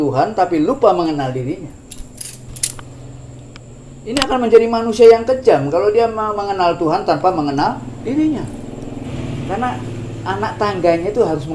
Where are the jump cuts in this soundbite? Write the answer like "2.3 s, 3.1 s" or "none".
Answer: 9.1 s